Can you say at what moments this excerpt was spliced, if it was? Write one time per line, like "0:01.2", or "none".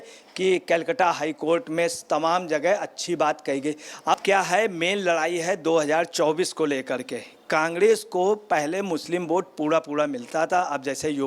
0:04.1